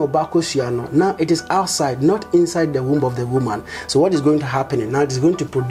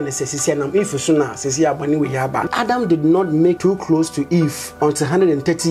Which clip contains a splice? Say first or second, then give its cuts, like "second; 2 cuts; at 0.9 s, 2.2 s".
second; 3 cuts; at 2.5 s, 3.6 s, 4.6 s